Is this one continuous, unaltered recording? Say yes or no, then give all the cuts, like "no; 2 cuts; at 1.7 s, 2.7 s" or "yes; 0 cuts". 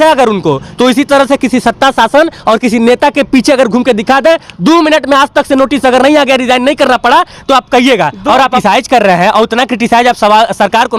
no; 1 cut; at 8.6 s